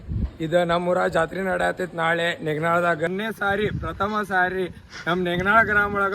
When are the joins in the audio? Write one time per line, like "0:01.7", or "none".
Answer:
0:03.1